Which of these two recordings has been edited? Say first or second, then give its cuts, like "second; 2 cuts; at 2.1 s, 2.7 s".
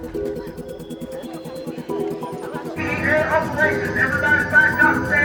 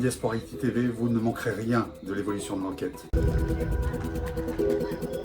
second; 1 cut; at 3.1 s